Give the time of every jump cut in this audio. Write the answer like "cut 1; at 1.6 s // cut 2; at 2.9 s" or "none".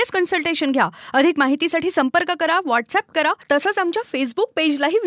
cut 1; at 3.4 s

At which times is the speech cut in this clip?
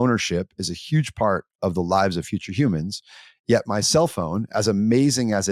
none

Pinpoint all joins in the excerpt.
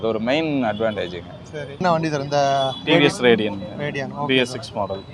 cut 1; at 1.8 s

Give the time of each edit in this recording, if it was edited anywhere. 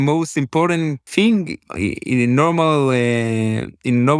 cut 1; at 1.1 s

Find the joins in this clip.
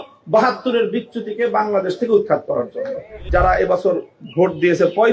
cut 1; at 3.2 s

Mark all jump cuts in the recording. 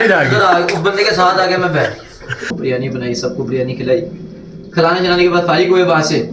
cut 1; at 2.5 s

